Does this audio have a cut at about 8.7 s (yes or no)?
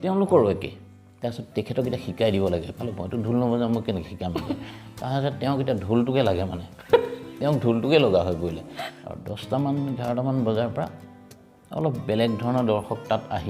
yes